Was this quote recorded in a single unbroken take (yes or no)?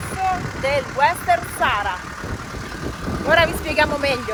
yes